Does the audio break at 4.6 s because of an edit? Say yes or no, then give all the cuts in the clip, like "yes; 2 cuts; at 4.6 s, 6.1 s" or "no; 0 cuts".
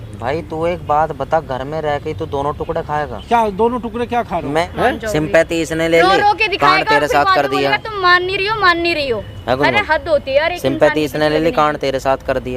yes; 1 cut; at 4.6 s